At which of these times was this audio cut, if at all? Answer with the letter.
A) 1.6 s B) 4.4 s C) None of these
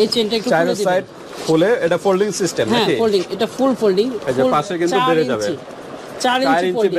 C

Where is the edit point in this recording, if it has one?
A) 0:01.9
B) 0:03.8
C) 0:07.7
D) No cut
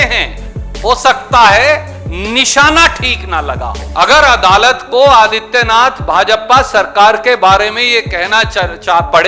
B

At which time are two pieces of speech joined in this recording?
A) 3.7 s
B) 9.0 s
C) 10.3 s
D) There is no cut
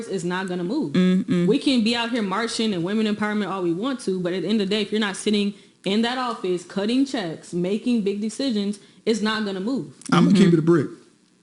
C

